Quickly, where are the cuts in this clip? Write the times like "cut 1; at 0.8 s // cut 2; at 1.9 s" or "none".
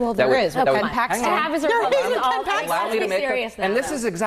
none